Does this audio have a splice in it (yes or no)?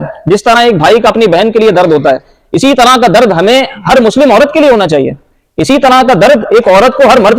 no